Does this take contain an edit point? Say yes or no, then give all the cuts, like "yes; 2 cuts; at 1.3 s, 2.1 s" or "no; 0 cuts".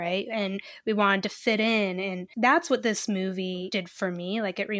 yes; 2 cuts; at 2.2 s, 3.7 s